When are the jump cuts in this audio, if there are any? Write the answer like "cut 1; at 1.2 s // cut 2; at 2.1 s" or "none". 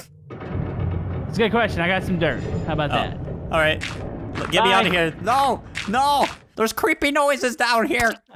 cut 1; at 6.4 s